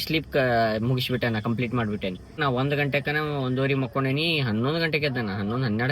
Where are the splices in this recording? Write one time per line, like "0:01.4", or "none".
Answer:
0:02.4